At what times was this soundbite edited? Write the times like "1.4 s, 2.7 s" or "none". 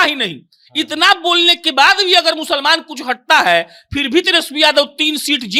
none